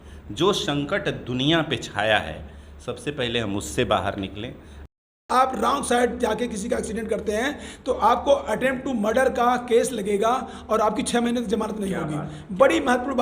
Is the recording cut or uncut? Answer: cut